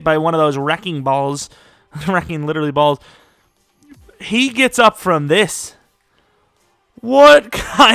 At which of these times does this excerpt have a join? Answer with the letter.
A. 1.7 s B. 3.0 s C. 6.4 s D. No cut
D